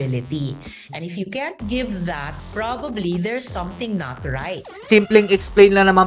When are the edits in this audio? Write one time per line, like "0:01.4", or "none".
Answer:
0:02.4
0:04.8